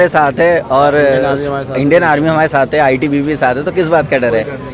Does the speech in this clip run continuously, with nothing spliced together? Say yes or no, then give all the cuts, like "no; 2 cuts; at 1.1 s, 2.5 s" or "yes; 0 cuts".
yes; 0 cuts